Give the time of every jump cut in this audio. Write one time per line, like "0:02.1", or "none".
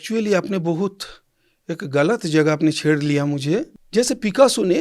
0:03.8

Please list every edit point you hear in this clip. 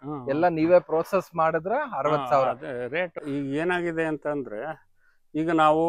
0:03.2

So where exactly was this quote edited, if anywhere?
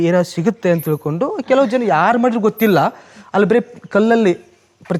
none

